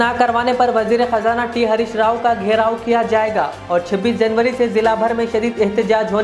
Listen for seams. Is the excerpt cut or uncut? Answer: uncut